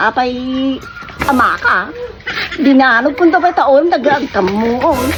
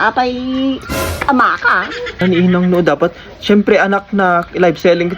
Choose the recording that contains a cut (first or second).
second